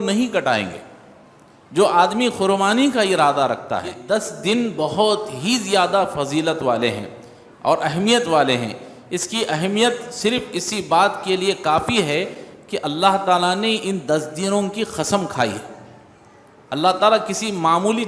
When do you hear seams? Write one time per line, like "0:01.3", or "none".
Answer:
0:04.0